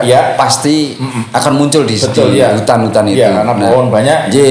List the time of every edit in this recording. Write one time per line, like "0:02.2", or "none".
none